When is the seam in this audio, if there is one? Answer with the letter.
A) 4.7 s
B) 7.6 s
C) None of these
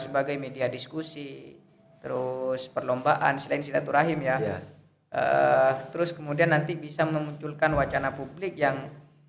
C